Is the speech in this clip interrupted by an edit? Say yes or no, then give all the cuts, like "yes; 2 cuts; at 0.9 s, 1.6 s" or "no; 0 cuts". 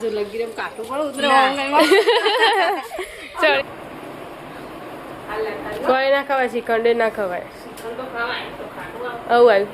yes; 1 cut; at 3.6 s